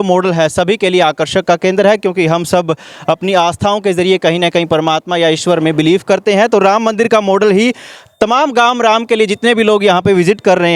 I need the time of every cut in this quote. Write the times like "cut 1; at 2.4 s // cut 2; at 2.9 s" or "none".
none